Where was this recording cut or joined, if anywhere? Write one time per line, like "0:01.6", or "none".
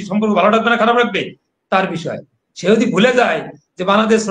none